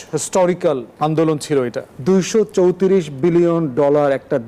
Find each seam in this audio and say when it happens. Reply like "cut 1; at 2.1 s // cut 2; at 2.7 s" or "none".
cut 1; at 0.9 s // cut 2; at 1.9 s

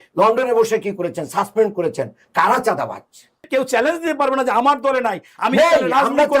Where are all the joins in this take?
cut 1; at 3.4 s

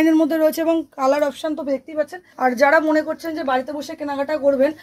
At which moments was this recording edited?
cut 1; at 2.2 s

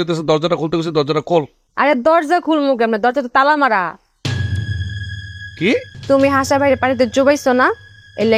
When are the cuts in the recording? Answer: cut 1; at 1.6 s // cut 2; at 5.9 s

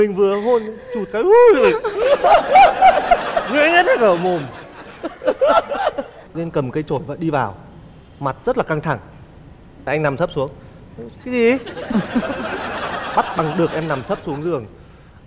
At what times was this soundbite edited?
cut 1; at 6.2 s

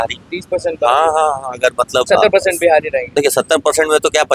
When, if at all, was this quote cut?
cut 1; at 2.1 s // cut 2; at 3.0 s

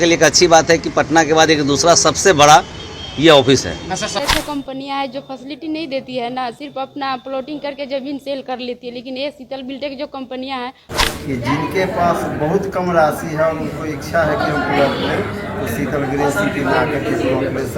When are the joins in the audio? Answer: cut 1; at 4.2 s // cut 2; at 10.9 s

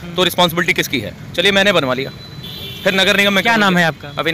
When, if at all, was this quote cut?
none

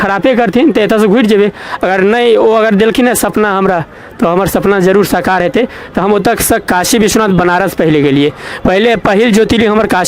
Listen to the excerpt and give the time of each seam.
none

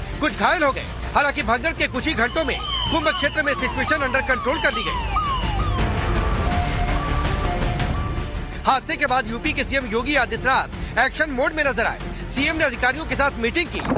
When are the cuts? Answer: cut 1; at 2.8 s

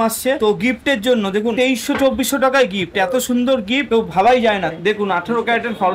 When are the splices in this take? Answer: cut 1; at 4.7 s

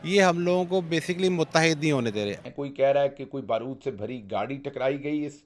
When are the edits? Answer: cut 1; at 2.4 s

